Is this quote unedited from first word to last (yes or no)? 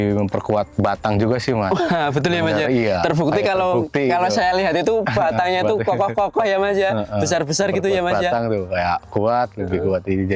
yes